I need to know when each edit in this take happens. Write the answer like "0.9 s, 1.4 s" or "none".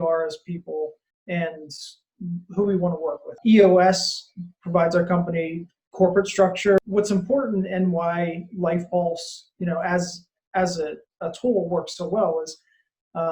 3.4 s, 6.8 s